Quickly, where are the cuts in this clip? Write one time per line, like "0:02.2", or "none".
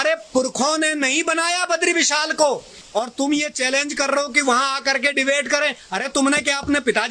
0:02.7

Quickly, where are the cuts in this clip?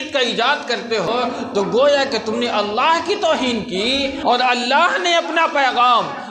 0:01.1
0:04.2

